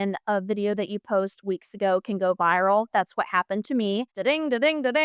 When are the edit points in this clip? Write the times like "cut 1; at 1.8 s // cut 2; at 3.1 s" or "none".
cut 1; at 4.1 s